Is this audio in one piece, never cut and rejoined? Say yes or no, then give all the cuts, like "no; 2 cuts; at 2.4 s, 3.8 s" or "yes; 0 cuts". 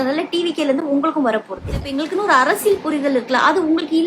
no; 1 cut; at 2.0 s